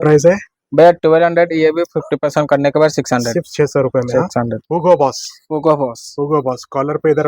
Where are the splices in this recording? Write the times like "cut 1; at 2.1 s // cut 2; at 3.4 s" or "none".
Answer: cut 1; at 4.6 s